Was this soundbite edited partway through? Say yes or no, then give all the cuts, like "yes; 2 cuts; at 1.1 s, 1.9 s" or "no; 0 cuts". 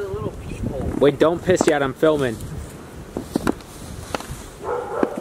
no; 0 cuts